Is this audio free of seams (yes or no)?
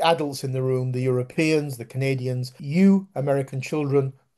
no